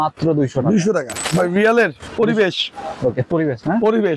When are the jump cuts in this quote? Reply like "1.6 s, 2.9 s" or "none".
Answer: 1.2 s, 2.0 s